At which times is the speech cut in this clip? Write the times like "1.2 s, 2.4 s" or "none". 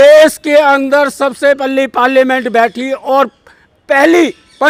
none